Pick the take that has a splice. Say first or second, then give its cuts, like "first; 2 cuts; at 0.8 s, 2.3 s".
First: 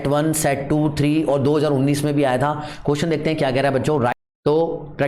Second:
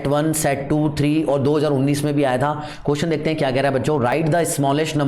first; 1 cut; at 4.1 s